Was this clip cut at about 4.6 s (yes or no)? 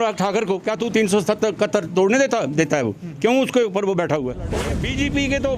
yes